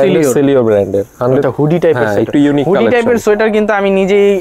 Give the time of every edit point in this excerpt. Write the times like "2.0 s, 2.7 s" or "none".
1.4 s